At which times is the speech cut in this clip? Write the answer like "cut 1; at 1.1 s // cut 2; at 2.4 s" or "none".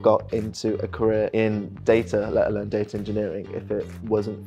cut 1; at 1.3 s